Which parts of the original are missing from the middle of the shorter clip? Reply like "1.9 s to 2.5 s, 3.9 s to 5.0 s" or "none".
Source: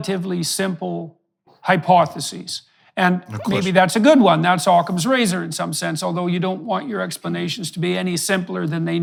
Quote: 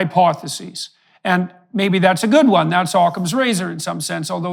none